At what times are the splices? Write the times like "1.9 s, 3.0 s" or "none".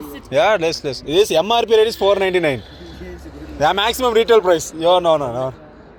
none